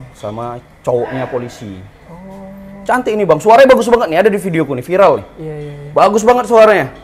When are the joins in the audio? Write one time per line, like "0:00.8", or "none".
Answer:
none